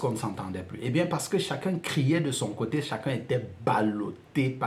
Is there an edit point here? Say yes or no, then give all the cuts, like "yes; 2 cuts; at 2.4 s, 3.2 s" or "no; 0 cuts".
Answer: no; 0 cuts